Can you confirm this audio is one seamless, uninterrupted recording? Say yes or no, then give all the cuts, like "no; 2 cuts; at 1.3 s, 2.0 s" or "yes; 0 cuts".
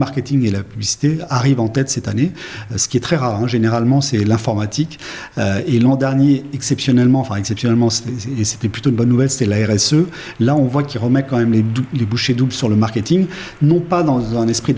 yes; 0 cuts